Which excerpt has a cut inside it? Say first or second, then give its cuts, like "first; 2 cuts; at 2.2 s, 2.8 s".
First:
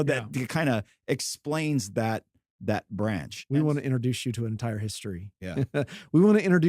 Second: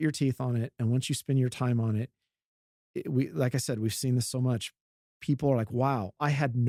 first; 1 cut; at 3.3 s